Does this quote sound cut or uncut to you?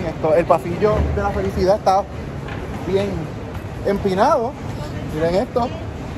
uncut